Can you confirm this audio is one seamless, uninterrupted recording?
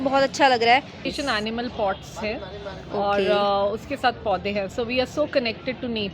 no; 1 cut; at 1.1 s

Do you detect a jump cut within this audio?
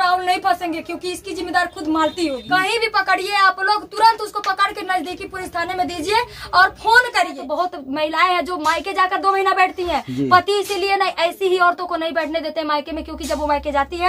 yes; 2 cuts; at 2.4 s, 7.4 s

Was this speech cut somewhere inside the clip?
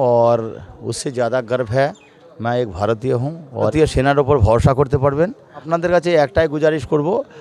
yes; 2 cuts; at 3.7 s, 5.7 s

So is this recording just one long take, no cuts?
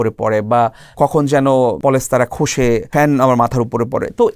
no; 3 cuts; at 0.9 s, 1.8 s, 2.9 s

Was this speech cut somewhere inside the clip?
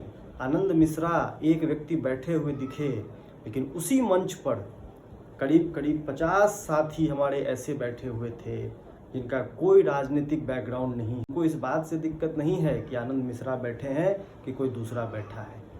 yes; 1 cut; at 11.3 s

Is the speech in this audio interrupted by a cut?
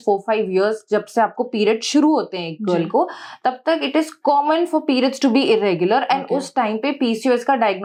no; 0 cuts

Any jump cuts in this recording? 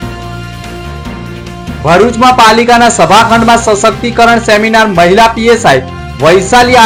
no; 0 cuts

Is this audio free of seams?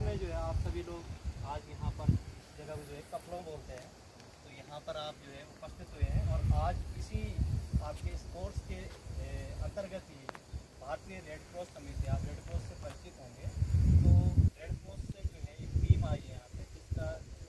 yes; 0 cuts

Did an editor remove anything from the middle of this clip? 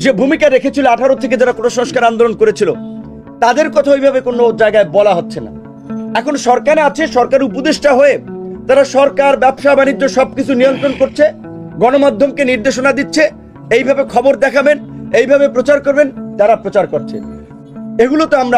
yes; 1 cut; at 17.5 s

